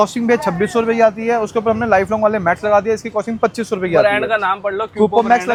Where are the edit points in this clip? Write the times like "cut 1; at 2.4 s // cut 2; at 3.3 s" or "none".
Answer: none